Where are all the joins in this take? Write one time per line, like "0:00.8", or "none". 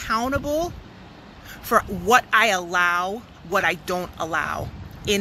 none

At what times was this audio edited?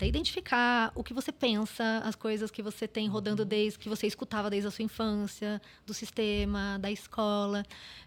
none

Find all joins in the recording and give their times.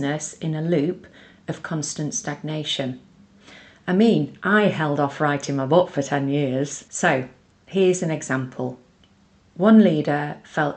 0:06.8

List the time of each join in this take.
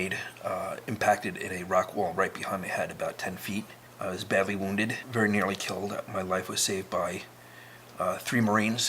0:03.8
0:05.0

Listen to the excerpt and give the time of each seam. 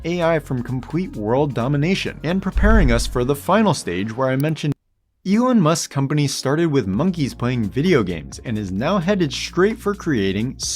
0:05.0

